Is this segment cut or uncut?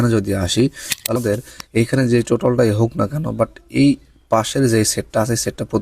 cut